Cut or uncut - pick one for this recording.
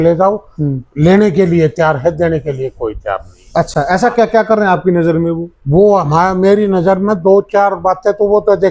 uncut